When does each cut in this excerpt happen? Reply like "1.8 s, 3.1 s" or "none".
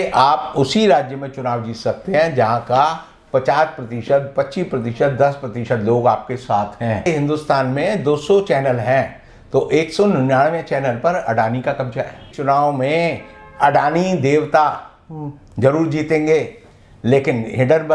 7.1 s, 12.2 s